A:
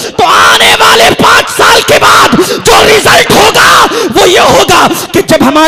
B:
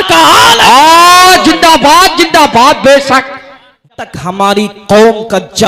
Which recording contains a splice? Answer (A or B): B